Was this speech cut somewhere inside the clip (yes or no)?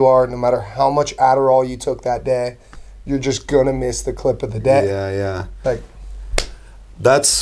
no